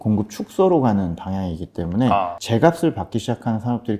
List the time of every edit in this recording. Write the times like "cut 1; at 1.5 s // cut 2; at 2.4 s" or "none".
cut 1; at 2.4 s